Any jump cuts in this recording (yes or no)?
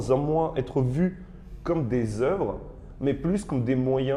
no